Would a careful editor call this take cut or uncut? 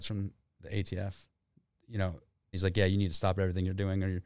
cut